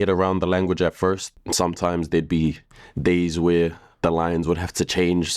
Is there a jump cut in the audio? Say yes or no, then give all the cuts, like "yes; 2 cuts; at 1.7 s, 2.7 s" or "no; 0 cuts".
yes; 1 cut; at 1.2 s